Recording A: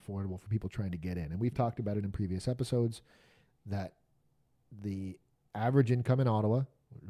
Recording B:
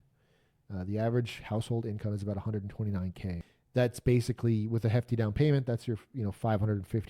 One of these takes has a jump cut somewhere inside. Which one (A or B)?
B